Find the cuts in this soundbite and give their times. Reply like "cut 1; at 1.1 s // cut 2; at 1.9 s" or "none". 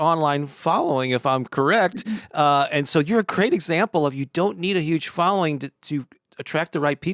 none